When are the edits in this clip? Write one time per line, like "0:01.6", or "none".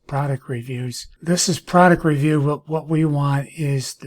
0:01.1